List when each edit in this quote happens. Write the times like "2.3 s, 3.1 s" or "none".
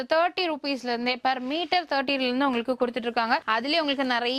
none